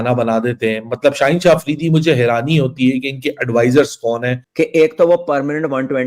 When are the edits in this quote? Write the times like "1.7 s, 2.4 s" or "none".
4.5 s